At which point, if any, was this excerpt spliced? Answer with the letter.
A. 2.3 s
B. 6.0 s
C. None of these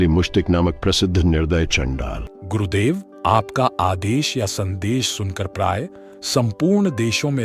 A